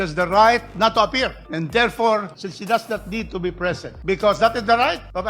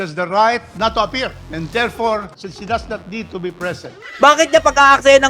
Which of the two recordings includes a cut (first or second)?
second